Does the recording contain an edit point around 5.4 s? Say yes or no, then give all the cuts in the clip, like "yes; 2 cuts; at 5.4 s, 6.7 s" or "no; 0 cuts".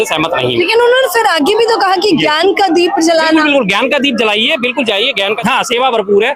yes; 1 cut; at 5.4 s